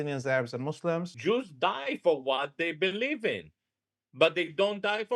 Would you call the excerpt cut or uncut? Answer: cut